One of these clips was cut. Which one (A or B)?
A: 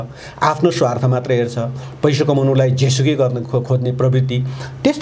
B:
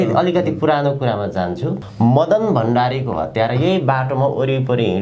B